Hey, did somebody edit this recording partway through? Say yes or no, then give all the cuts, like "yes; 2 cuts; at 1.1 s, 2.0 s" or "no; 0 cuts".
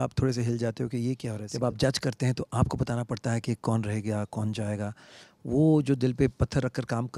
yes; 1 cut; at 1.4 s